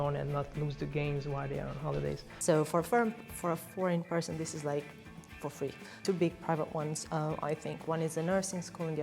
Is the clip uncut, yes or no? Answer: no